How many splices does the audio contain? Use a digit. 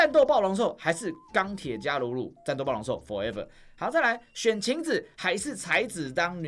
0